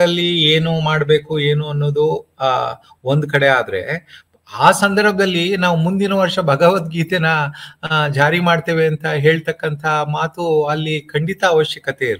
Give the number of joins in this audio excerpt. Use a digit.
0